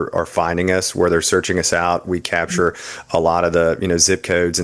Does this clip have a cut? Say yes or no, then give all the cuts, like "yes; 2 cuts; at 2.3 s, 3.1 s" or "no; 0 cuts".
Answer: no; 0 cuts